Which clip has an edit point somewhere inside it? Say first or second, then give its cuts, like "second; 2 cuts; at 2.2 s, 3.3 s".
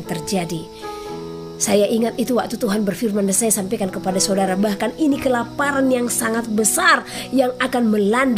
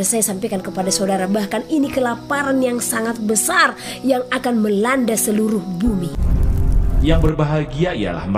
second; 1 cut; at 6.2 s